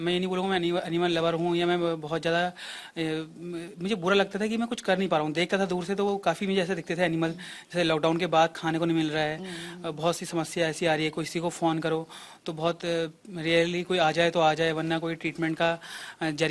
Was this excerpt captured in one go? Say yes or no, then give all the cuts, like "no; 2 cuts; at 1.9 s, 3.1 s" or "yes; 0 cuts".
yes; 0 cuts